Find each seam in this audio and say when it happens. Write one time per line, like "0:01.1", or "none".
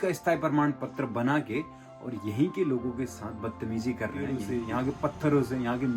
0:04.4